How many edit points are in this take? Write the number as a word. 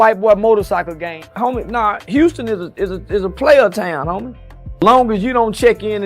one